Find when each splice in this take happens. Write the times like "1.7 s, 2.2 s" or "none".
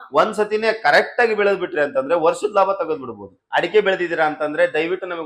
3.4 s